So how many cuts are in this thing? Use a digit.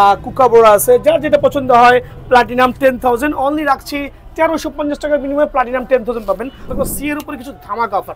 1